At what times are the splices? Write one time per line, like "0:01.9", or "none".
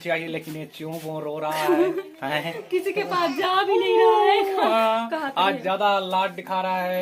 none